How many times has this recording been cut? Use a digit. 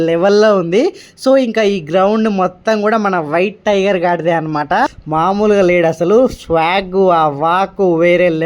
1